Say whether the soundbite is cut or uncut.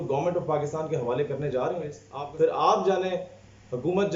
cut